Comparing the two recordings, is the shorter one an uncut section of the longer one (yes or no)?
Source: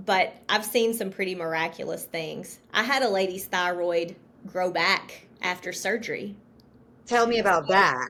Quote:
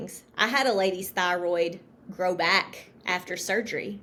yes